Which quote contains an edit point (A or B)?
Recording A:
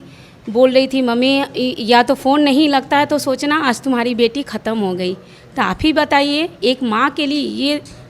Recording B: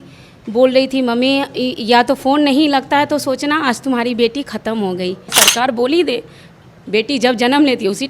B